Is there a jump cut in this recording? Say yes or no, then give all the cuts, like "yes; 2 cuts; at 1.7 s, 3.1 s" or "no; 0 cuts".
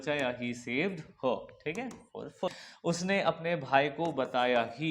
yes; 1 cut; at 2.6 s